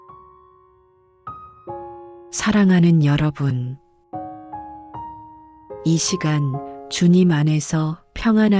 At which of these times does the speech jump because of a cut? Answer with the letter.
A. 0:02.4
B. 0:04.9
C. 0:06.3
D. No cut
A